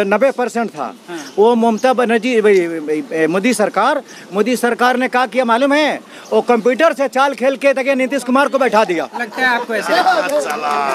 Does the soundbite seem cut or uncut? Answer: uncut